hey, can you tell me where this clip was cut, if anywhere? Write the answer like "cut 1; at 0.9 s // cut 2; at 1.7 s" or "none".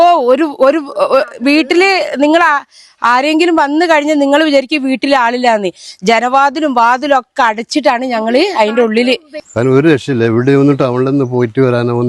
cut 1; at 9.4 s